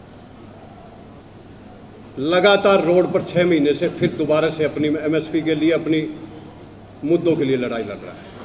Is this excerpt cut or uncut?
uncut